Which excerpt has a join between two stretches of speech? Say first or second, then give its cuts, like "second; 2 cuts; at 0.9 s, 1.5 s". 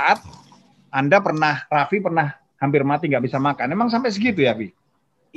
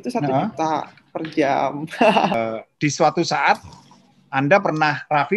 second; 1 cut; at 2.4 s